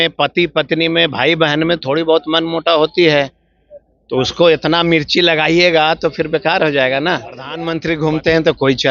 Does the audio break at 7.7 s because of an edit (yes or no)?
yes